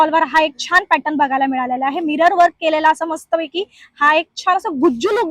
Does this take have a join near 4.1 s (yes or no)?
no